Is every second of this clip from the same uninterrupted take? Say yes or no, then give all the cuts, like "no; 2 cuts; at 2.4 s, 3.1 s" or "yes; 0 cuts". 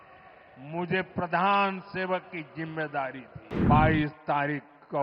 no; 1 cut; at 3.6 s